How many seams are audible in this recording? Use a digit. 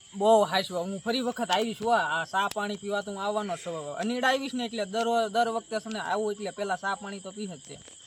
0